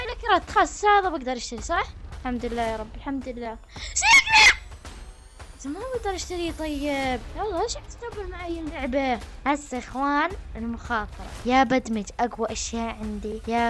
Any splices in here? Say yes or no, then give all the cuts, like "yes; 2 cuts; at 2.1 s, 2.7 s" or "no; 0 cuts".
yes; 3 cuts; at 2.0 s, 7.3 s, 9.3 s